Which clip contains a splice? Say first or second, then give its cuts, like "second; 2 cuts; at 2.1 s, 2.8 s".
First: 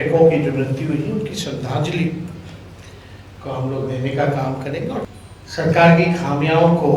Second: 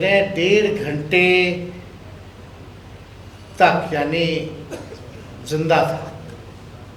first; 1 cut; at 5.1 s